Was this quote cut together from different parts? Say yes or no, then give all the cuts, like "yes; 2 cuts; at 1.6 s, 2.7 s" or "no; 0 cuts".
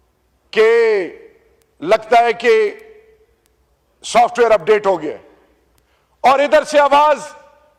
no; 0 cuts